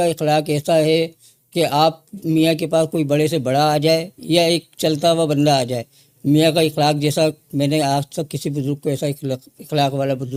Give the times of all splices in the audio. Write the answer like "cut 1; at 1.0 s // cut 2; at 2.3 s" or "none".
none